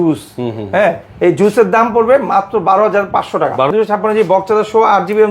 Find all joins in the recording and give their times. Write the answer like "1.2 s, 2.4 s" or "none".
3.7 s